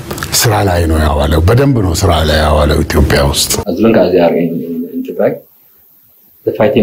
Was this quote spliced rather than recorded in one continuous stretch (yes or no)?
yes